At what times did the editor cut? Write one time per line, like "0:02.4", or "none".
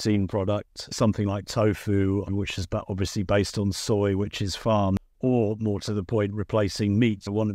0:05.1